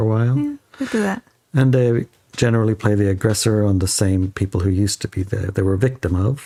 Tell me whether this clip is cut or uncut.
uncut